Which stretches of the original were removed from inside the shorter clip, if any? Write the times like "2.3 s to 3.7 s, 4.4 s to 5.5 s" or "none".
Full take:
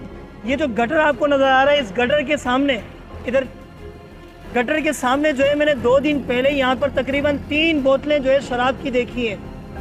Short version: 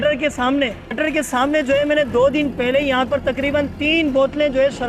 3.0 s to 4.7 s